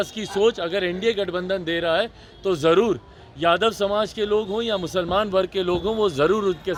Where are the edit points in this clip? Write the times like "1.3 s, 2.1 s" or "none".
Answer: none